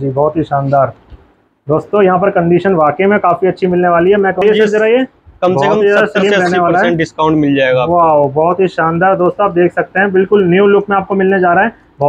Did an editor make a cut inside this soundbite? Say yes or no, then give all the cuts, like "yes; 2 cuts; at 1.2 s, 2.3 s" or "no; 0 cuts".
yes; 1 cut; at 4.4 s